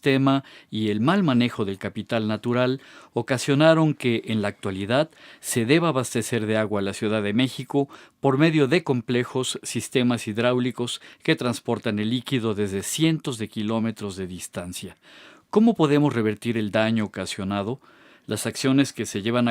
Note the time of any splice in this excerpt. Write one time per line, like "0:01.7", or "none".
0:12.4